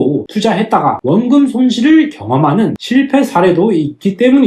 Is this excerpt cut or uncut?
uncut